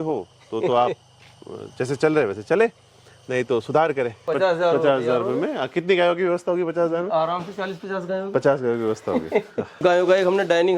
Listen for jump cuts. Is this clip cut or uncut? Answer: cut